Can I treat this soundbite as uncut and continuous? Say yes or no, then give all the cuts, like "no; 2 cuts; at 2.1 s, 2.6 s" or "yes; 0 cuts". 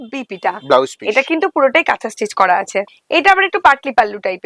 no; 1 cut; at 2.8 s